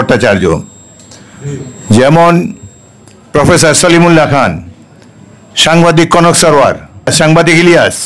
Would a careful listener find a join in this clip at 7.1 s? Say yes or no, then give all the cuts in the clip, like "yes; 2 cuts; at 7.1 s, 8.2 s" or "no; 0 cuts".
yes; 1 cut; at 7.1 s